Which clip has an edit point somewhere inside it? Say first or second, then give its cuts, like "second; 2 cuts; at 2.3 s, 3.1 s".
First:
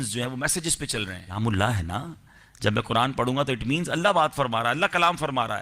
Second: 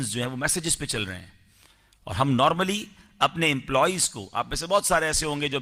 first; 1 cut; at 1.2 s